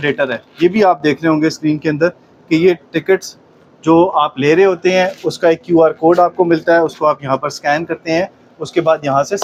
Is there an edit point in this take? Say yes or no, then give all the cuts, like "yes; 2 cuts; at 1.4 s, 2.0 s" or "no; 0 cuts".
no; 0 cuts